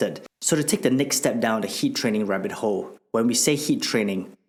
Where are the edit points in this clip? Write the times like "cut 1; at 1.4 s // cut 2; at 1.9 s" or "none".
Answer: none